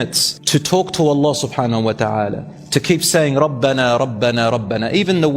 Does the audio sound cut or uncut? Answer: uncut